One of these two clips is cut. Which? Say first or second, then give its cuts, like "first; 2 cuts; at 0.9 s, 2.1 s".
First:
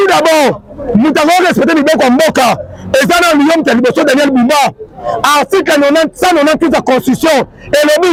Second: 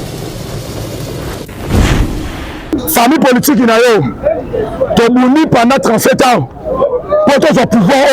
second; 1 cut; at 2.7 s